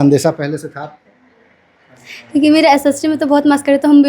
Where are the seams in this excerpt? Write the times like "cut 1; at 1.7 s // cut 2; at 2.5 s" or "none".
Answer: none